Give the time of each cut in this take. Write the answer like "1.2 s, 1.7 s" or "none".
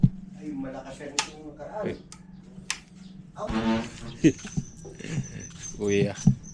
3.5 s